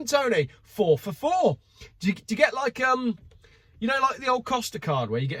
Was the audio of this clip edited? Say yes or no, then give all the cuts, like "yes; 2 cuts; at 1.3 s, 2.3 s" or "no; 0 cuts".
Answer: no; 0 cuts